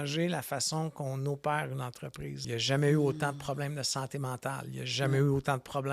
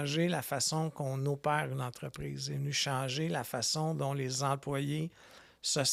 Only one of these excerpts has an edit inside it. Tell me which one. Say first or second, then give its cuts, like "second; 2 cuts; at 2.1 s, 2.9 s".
first; 1 cut; at 2.5 s